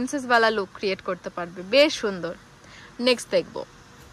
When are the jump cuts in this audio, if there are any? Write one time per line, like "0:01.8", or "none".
none